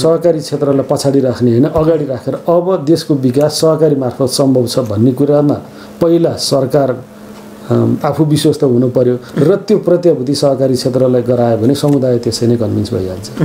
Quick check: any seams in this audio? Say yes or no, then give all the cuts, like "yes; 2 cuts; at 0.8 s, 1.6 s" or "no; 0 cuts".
no; 0 cuts